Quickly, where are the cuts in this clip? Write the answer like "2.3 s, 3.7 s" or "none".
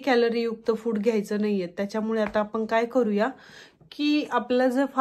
none